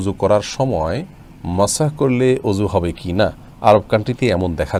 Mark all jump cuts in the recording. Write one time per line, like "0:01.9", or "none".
none